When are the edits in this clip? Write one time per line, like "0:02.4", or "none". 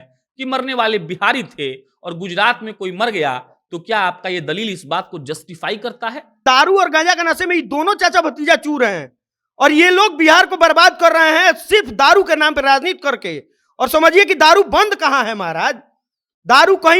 0:06.4